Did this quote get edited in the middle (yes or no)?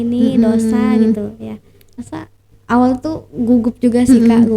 yes